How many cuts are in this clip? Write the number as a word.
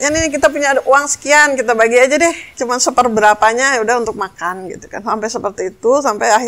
zero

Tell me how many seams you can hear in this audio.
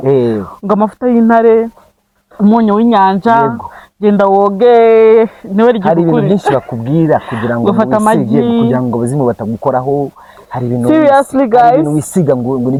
zero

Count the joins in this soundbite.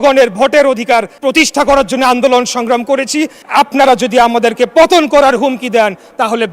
two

